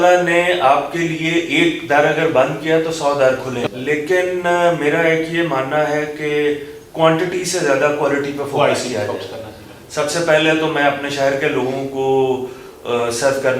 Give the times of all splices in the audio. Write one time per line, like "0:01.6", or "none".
0:03.7